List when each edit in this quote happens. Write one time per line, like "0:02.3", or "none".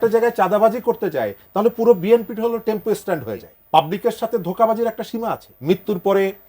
0:03.5
0:05.5